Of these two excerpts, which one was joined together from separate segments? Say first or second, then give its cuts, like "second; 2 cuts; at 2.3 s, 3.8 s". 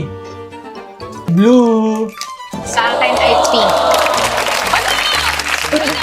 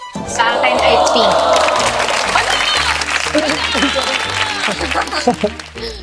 first; 1 cut; at 1.3 s